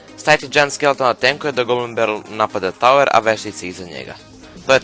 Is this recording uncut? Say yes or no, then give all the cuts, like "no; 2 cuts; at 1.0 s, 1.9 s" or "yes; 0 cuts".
no; 1 cut; at 1.5 s